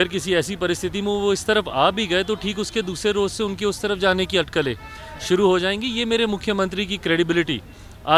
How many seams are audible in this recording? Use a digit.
0